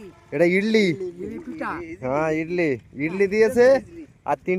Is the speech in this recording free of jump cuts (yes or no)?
yes